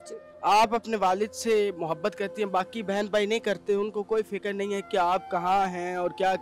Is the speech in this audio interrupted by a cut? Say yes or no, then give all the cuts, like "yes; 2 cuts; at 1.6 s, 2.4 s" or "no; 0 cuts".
no; 0 cuts